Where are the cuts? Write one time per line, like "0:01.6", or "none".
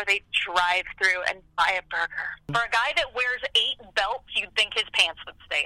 0:02.6